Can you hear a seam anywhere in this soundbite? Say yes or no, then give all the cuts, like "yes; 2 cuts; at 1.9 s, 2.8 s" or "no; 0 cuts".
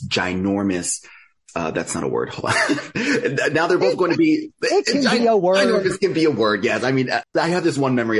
yes; 1 cut; at 7.2 s